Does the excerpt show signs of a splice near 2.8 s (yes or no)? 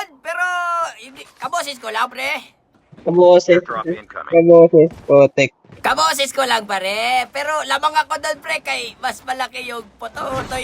yes